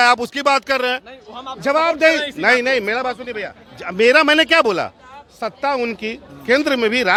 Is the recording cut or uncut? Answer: uncut